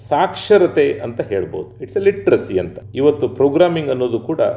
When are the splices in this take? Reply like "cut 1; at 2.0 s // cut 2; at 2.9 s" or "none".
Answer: cut 1; at 2.8 s